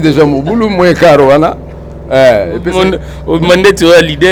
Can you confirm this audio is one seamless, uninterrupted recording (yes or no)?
yes